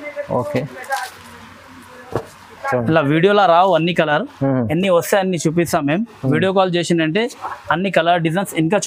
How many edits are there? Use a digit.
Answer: 0